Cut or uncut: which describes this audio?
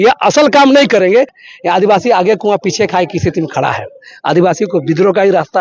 cut